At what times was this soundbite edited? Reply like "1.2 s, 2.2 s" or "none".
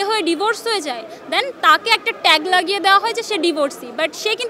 none